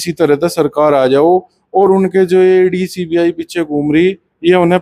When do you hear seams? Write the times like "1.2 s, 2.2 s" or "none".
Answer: none